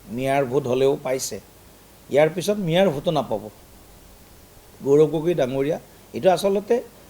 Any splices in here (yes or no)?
yes